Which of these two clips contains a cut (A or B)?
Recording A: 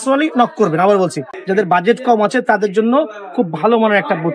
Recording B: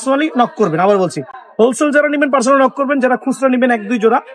A